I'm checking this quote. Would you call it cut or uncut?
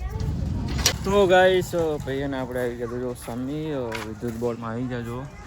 cut